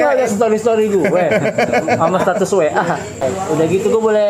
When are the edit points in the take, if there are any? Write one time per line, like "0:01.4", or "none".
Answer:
0:03.3